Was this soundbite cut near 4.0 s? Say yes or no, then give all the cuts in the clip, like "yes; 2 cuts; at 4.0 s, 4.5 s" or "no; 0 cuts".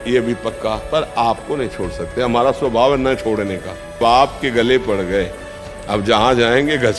yes; 2 cuts; at 0.8 s, 4.0 s